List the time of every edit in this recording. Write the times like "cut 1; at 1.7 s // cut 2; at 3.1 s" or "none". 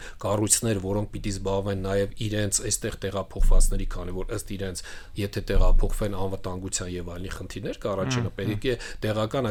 none